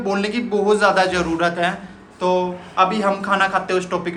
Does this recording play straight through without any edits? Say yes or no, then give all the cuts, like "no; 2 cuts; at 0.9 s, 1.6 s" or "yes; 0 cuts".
yes; 0 cuts